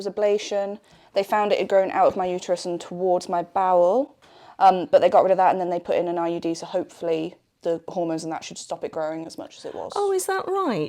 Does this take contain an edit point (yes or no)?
no